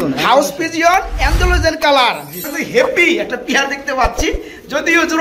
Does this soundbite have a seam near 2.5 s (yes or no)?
yes